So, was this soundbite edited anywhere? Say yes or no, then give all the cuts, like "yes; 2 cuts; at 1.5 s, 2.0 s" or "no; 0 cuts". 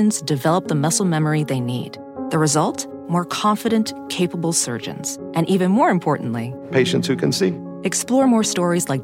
no; 0 cuts